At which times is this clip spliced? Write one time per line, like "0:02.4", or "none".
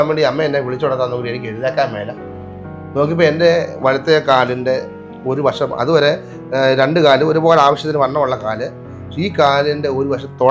none

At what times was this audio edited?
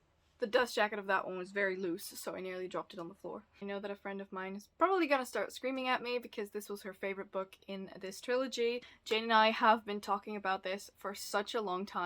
0:03.5
0:08.9

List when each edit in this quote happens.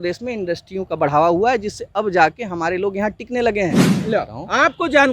0:03.9

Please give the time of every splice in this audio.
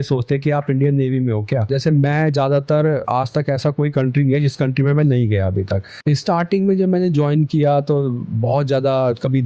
0:01.7
0:06.2

